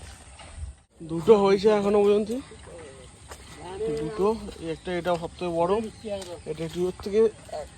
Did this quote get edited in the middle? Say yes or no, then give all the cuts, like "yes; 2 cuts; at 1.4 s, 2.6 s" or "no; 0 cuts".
yes; 1 cut; at 1.0 s